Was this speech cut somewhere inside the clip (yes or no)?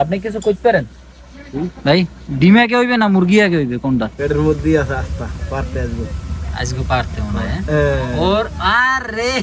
yes